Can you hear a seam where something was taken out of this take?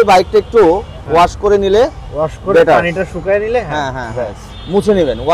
no; 0 cuts

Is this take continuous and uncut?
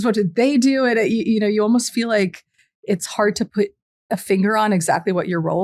yes; 0 cuts

